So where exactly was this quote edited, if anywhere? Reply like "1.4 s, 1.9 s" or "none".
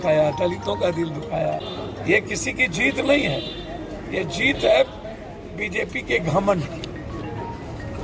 1.7 s